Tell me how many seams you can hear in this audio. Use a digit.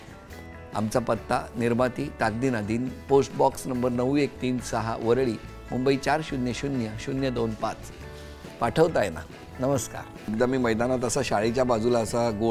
1